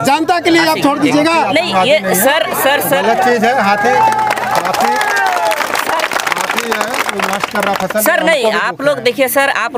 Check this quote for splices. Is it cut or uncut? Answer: uncut